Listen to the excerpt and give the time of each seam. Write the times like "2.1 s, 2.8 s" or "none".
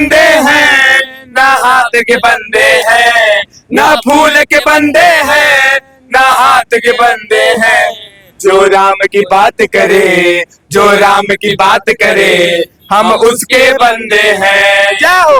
none